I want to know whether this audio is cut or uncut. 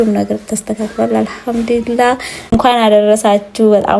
cut